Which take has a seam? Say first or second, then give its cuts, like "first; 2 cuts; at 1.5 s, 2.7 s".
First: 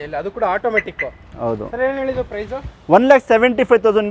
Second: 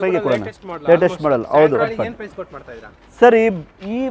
second; 1 cut; at 1.9 s